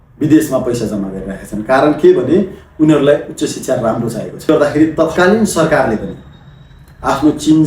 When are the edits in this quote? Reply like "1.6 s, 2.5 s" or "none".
4.5 s